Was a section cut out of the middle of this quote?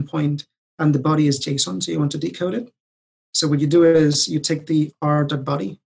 no; 0 cuts

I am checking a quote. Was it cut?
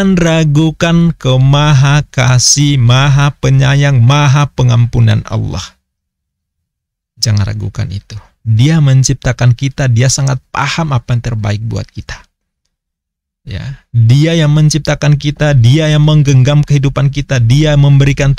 no; 0 cuts

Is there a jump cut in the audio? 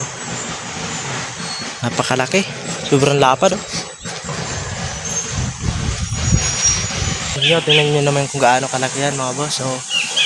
yes; 1 cut; at 7.4 s

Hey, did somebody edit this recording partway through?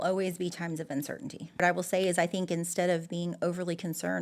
yes; 1 cut; at 1.6 s

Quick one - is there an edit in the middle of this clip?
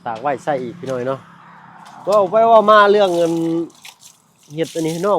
no; 0 cuts

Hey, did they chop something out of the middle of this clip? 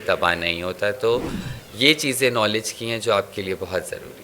no; 0 cuts

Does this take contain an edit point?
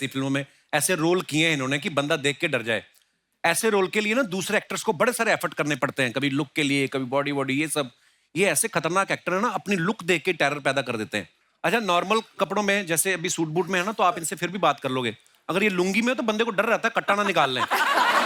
no; 0 cuts

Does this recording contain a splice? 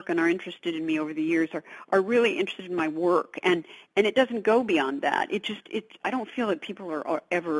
no; 0 cuts

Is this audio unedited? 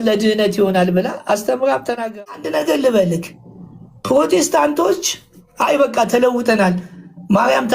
no; 1 cut; at 2.2 s

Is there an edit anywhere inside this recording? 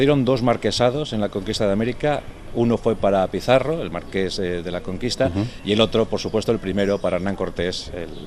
no; 0 cuts

